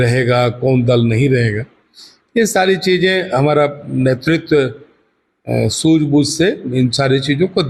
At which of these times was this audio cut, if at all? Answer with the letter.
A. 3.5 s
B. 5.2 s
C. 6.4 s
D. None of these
D